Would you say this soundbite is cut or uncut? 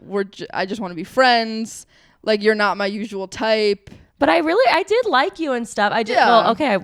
uncut